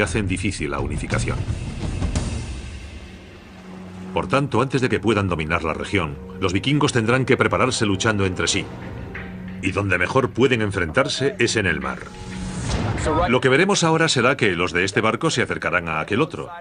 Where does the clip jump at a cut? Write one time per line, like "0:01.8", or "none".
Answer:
none